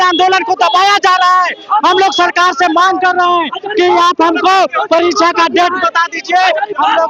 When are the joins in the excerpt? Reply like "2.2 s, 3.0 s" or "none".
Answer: none